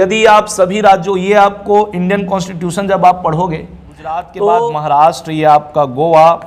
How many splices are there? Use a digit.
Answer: 1